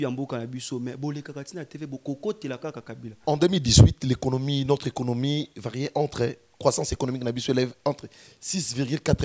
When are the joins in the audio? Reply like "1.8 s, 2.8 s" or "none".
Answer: 3.0 s